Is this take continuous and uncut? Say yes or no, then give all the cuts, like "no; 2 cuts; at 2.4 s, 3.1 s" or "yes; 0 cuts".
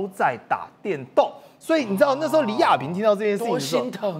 yes; 0 cuts